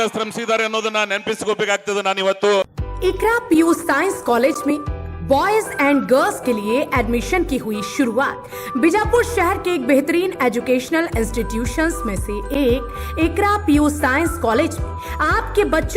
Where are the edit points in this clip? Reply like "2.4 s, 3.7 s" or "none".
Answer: 2.6 s